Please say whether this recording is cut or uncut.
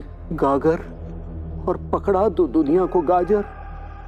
uncut